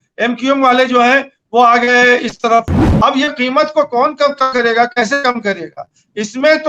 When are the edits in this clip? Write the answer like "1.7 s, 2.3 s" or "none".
2.8 s